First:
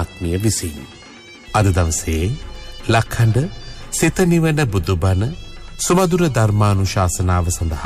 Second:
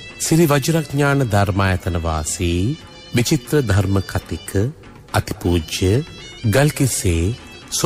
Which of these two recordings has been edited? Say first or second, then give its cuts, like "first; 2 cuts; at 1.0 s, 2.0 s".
first; 1 cut; at 1.2 s